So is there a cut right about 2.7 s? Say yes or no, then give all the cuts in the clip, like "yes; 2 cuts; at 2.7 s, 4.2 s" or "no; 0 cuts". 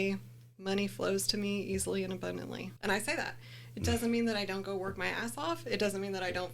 yes; 1 cut; at 2.7 s